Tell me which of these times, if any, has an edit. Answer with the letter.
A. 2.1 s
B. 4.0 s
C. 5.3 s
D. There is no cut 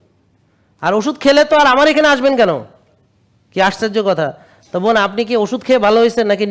D